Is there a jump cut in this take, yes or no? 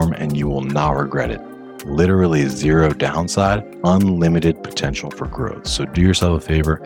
yes